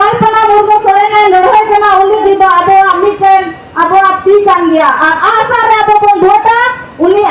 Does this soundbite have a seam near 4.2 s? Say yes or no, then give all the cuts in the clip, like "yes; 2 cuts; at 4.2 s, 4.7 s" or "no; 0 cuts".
no; 1 cut; at 2.2 s